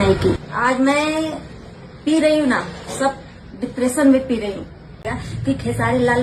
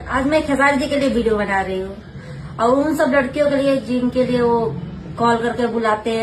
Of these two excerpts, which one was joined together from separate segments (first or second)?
first